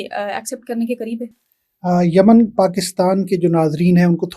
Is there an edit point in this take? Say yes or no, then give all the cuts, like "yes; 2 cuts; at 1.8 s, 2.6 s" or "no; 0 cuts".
no; 0 cuts